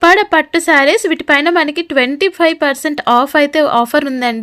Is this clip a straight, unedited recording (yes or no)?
yes